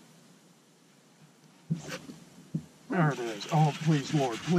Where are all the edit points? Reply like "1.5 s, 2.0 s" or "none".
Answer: none